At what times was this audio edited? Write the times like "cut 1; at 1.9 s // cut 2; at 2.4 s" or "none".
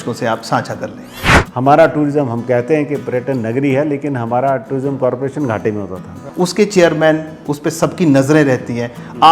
cut 1; at 1.4 s // cut 2; at 6.2 s